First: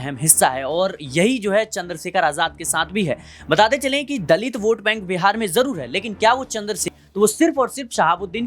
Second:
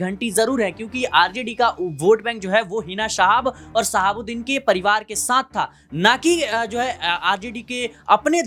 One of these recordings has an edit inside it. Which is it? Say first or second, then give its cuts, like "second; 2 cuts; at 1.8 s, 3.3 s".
first; 1 cut; at 6.9 s